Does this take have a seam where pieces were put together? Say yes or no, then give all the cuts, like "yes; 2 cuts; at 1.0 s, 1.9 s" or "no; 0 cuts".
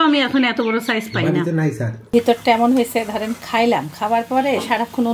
yes; 1 cut; at 1.9 s